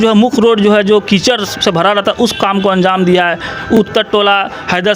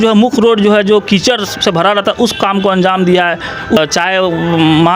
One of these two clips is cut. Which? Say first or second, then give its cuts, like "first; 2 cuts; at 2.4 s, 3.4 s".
second; 1 cut; at 3.8 s